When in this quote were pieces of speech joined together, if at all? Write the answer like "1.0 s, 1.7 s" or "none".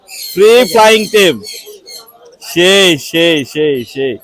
none

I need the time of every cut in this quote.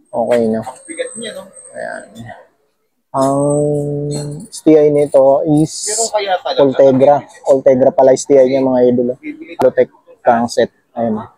9.6 s

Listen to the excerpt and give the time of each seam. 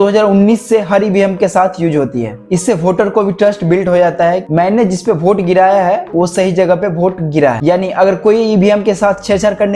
2.4 s, 7.6 s

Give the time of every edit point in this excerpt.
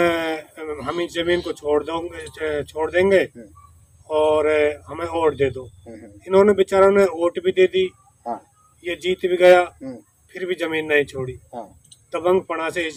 none

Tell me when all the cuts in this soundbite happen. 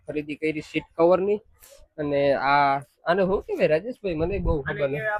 none

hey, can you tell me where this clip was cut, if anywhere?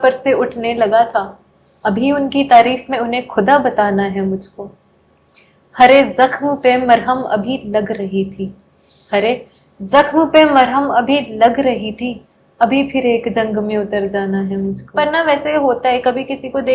14.8 s

